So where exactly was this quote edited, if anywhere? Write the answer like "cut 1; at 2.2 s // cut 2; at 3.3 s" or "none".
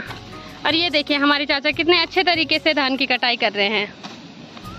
none